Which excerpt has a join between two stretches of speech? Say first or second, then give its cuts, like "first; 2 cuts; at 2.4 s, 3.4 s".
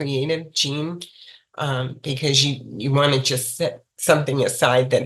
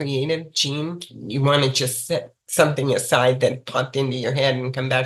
second; 1 cut; at 1.2 s